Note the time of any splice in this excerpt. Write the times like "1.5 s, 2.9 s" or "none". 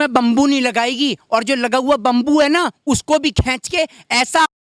none